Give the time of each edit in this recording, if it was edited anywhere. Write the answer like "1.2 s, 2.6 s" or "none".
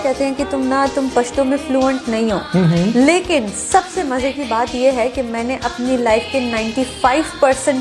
none

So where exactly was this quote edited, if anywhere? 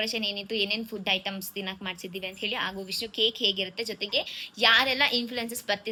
none

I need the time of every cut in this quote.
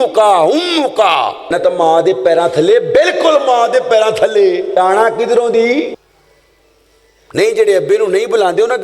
1.5 s, 4.7 s, 6.0 s

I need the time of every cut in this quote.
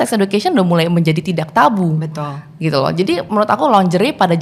none

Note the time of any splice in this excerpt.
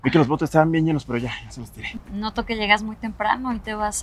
1.8 s

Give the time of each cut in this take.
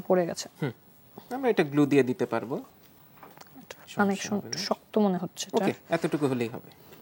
none

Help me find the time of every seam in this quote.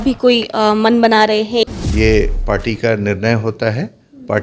1.7 s

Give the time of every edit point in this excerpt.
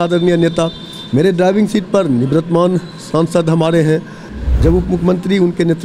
4.3 s

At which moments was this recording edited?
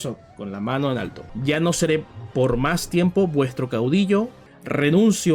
1.3 s, 4.4 s

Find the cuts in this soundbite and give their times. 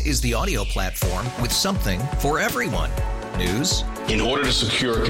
none

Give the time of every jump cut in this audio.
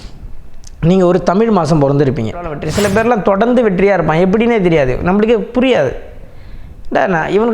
2.6 s

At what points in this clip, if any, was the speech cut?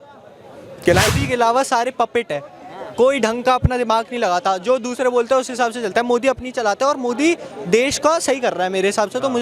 1.1 s

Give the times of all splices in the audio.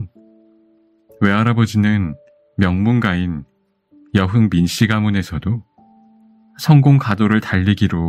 none

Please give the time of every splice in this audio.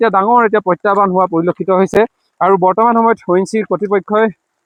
none

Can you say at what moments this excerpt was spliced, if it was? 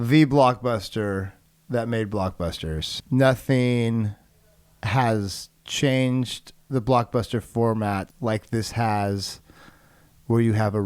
2.9 s, 8.1 s

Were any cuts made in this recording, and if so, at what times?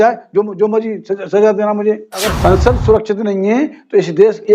2.3 s

